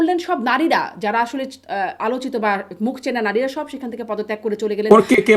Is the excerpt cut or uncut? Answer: uncut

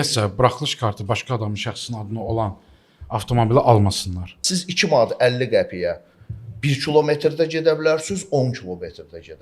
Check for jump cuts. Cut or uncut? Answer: cut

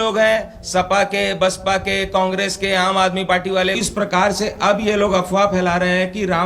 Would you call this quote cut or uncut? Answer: cut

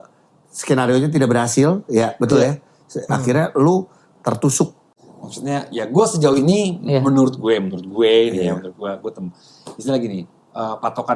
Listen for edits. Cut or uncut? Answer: cut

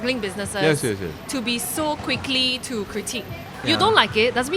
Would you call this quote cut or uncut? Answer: cut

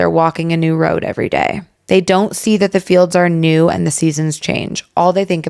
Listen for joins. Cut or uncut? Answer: uncut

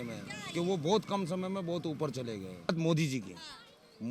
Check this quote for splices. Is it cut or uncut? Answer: cut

